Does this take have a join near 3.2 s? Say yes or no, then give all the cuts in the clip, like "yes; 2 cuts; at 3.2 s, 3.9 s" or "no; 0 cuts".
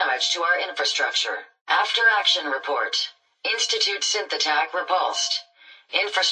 no; 1 cut; at 1.5 s